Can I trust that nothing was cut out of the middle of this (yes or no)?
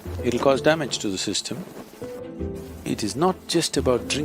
no